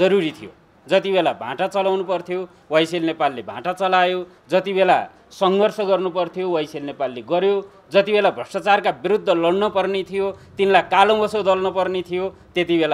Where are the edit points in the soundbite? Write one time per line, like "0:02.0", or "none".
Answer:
none